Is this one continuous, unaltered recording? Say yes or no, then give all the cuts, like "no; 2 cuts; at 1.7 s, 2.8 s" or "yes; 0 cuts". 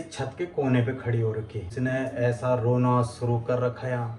no; 1 cut; at 1.7 s